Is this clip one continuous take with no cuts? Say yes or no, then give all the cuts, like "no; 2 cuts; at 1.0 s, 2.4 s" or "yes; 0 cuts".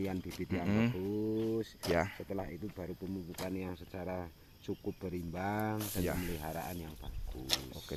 yes; 0 cuts